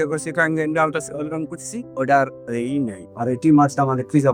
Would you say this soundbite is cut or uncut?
uncut